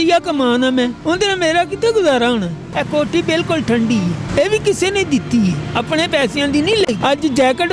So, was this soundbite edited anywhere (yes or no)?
yes